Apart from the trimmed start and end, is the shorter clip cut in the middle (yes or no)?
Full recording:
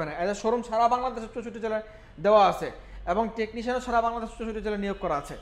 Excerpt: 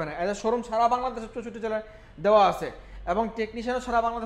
no